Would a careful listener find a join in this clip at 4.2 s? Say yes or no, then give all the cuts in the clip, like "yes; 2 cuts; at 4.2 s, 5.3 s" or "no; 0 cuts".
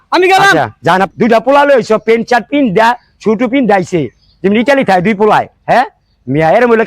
no; 1 cut; at 1.1 s